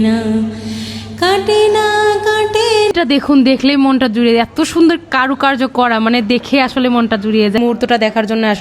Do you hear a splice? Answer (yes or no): yes